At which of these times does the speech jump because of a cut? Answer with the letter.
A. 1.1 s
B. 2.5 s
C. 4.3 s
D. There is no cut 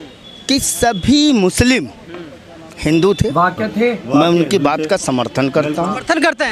D